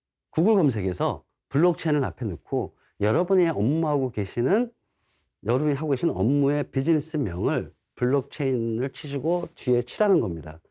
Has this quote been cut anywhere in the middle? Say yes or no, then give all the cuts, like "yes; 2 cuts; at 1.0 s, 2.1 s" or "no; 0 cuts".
no; 0 cuts